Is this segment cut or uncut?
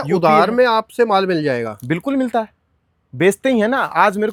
uncut